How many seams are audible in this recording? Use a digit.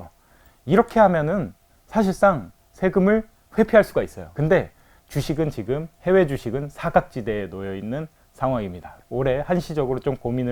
2